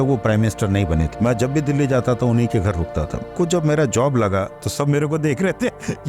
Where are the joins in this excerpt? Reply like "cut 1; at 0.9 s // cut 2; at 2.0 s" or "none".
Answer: cut 1; at 1.1 s // cut 2; at 3.2 s // cut 3; at 4.6 s